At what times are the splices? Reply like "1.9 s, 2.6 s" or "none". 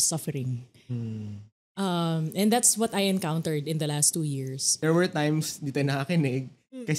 4.8 s